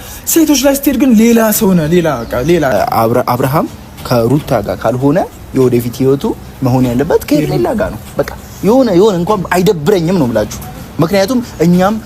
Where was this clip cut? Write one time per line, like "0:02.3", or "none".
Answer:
0:02.7